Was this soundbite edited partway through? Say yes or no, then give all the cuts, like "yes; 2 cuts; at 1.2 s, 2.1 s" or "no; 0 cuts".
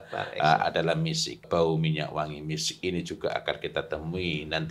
yes; 1 cut; at 1.4 s